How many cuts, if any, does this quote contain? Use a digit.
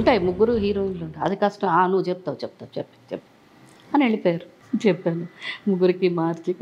1